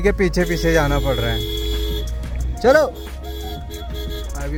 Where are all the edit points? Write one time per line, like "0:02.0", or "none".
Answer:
none